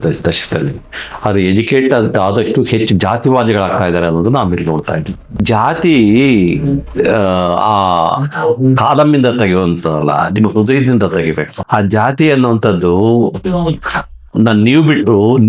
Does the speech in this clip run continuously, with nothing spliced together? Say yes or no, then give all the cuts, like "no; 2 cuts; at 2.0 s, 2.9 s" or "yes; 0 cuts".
no; 1 cut; at 5.3 s